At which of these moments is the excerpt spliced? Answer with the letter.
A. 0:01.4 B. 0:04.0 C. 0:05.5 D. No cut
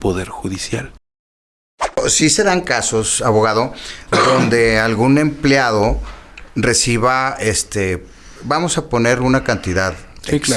A